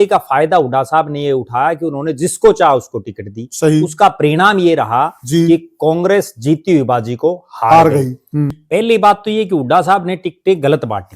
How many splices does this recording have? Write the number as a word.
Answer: one